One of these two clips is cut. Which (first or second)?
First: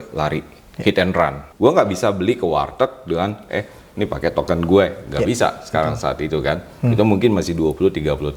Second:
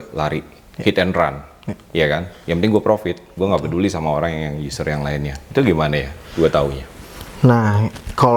first